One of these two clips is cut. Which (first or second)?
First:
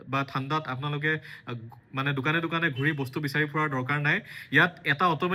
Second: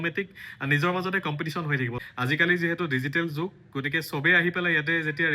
second